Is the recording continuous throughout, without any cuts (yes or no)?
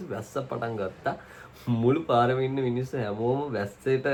yes